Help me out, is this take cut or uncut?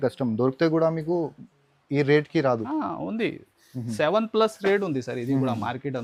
uncut